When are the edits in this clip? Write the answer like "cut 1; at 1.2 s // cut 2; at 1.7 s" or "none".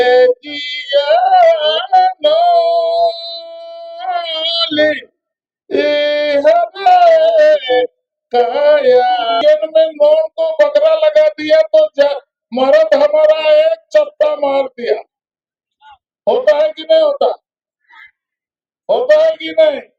cut 1; at 9.4 s